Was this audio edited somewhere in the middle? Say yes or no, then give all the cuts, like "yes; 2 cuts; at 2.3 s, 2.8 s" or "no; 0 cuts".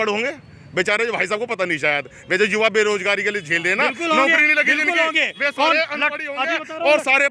no; 0 cuts